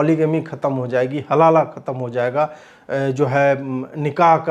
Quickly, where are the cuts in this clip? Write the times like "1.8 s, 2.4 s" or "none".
none